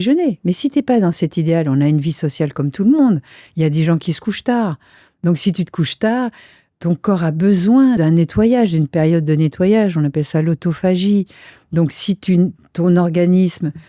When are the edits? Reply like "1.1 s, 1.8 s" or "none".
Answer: 8.0 s